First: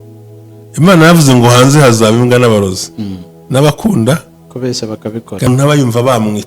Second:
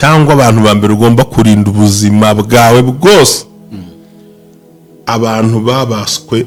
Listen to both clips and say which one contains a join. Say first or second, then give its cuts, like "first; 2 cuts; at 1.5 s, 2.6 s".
first; 1 cut; at 5.5 s